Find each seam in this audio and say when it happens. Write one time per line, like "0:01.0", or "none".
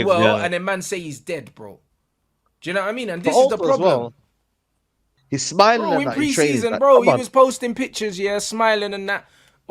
0:05.0